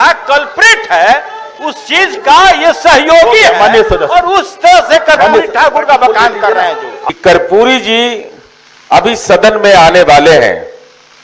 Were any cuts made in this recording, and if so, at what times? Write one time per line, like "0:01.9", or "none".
0:06.9